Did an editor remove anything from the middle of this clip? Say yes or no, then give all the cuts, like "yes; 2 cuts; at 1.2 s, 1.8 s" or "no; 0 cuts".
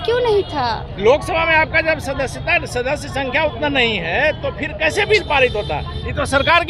no; 0 cuts